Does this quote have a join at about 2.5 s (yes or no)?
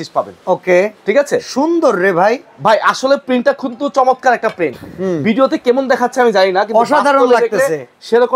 no